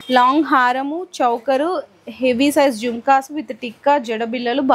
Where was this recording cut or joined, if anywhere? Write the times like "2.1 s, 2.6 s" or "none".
none